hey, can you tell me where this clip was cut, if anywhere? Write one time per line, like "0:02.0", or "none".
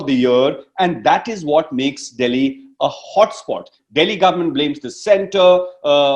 0:03.8

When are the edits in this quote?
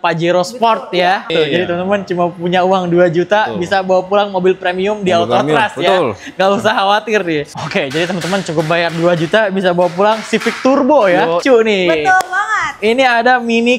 0:01.3
0:07.6
0:11.4

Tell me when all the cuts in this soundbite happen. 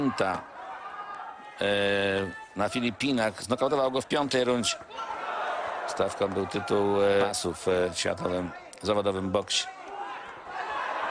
0:07.3

